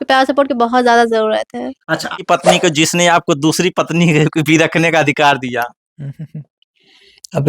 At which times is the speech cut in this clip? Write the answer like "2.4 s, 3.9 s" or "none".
2.2 s